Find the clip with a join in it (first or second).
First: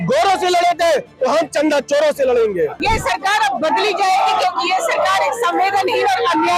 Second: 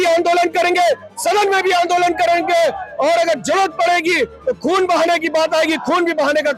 first